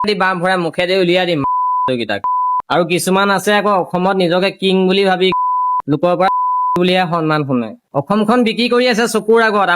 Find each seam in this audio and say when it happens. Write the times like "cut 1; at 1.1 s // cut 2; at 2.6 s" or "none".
cut 1; at 2.6 s // cut 2; at 7.8 s